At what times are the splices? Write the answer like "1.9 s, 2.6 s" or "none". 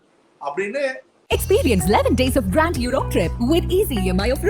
1.1 s